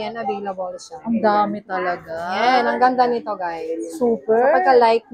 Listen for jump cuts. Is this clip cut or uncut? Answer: uncut